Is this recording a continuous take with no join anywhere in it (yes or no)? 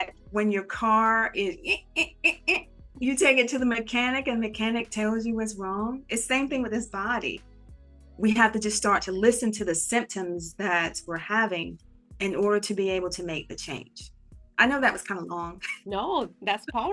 yes